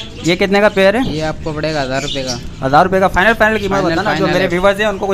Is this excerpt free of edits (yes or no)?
yes